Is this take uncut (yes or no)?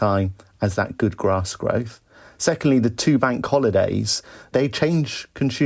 yes